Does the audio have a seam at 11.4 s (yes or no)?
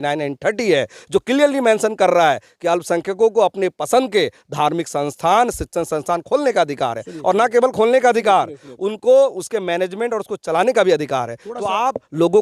no